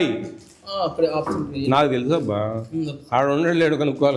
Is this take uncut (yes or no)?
yes